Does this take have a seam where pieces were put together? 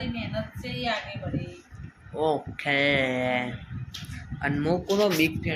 no; 0 cuts

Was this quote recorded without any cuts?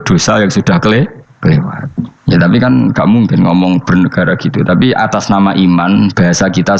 yes; 0 cuts

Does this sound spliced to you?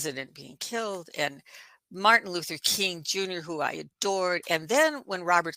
no; 0 cuts

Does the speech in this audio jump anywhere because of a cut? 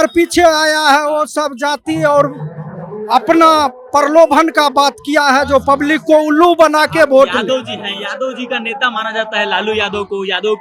no; 0 cuts

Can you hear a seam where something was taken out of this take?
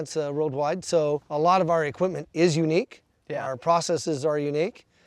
yes; 1 cut; at 1.3 s

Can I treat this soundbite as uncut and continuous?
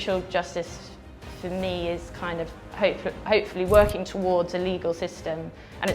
yes; 0 cuts

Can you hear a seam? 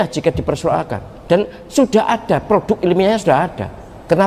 no; 0 cuts

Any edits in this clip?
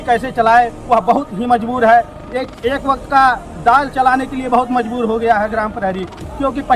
no; 0 cuts

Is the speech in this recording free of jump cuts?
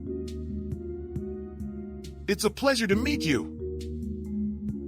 yes; 0 cuts

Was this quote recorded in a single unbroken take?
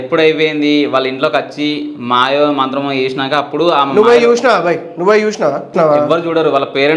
no; 1 cut; at 5.7 s

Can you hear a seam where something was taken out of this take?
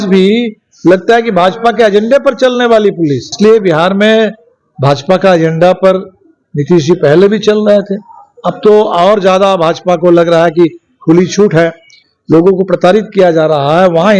yes; 2 cuts; at 3.2 s, 12.1 s

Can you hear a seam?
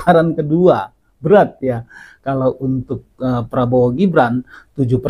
no; 0 cuts

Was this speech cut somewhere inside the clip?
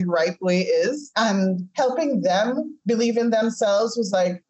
yes; 2 cuts; at 1.1 s, 2.7 s

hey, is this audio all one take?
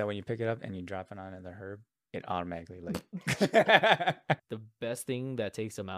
no; 1 cut; at 4.4 s

